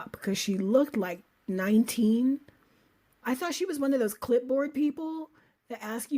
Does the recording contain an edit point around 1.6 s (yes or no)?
no